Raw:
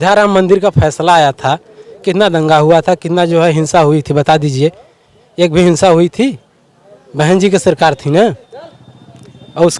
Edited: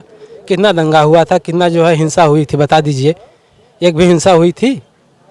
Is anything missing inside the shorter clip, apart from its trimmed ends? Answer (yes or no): no